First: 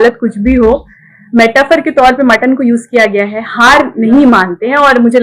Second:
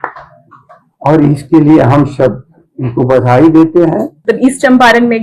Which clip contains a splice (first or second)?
second